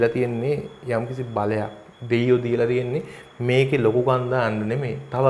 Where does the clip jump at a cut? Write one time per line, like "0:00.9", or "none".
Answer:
none